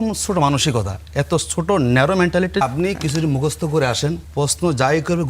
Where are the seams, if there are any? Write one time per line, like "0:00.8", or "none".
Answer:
0:02.6
0:04.2